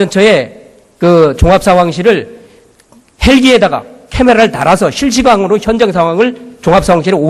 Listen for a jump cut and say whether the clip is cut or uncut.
uncut